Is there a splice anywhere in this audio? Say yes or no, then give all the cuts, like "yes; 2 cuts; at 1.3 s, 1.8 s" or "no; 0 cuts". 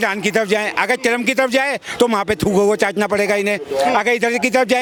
no; 0 cuts